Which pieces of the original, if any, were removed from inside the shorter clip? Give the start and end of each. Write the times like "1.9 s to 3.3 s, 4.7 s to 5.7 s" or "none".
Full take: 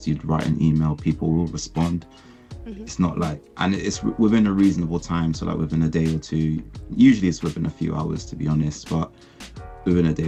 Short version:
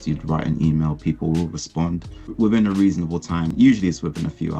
2.3 s to 4.1 s, 5.3 s to 6.9 s